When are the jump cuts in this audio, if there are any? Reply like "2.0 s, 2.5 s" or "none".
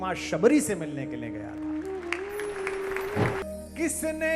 3.4 s